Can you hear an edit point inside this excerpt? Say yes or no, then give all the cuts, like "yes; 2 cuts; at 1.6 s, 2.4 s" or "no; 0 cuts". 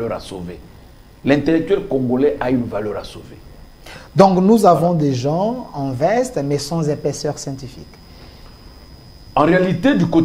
no; 0 cuts